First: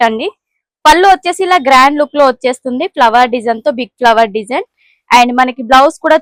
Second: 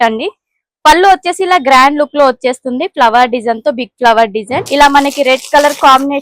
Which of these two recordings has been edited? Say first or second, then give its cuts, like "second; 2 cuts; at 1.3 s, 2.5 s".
second; 1 cut; at 4.6 s